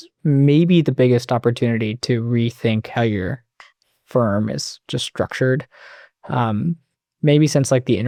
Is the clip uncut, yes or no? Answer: yes